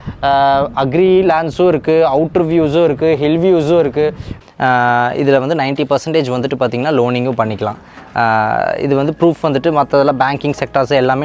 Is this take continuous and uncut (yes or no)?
no